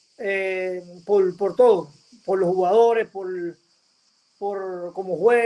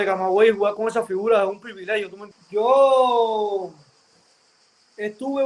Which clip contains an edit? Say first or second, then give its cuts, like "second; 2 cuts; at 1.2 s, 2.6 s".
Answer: second; 1 cut; at 2.2 s